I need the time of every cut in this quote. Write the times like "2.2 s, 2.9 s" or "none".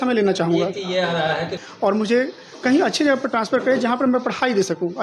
1.5 s